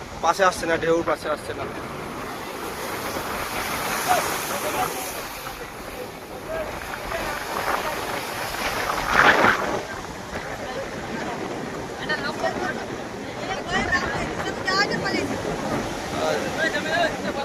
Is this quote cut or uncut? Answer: uncut